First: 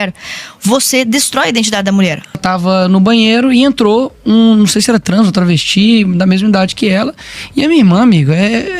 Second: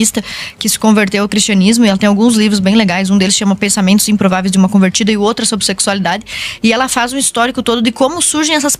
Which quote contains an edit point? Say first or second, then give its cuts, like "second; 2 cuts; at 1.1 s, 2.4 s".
first; 1 cut; at 2.4 s